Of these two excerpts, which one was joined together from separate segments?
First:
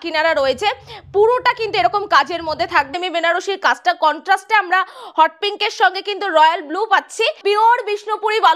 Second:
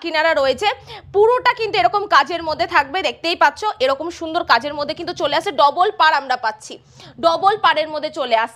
first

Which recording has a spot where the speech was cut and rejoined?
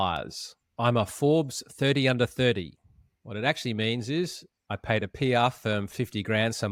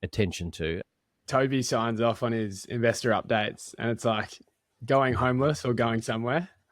second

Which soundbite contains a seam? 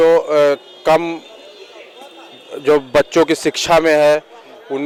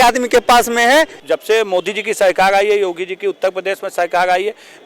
second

